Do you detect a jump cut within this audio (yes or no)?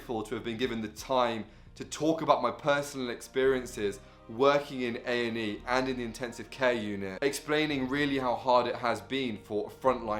no